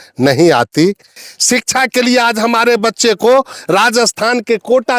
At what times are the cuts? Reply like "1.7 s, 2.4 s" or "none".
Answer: 1.1 s